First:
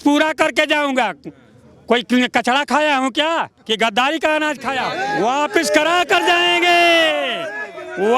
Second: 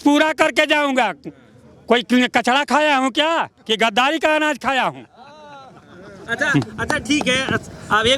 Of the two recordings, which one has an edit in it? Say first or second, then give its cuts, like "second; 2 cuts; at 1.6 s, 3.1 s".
first; 1 cut; at 4.9 s